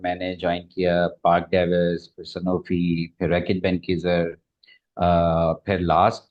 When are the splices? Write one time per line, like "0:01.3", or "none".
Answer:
none